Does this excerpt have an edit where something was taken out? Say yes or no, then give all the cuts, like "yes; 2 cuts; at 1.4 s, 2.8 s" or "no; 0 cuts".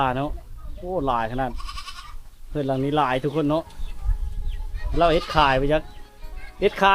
no; 0 cuts